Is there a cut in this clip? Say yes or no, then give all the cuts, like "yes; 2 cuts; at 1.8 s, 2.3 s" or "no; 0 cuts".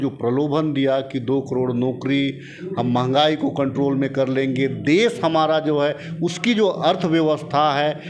no; 0 cuts